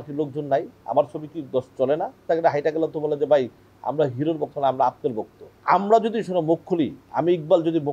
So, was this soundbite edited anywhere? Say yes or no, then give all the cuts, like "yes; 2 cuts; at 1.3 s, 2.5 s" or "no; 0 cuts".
yes; 3 cuts; at 2.2 s, 5.5 s, 7.0 s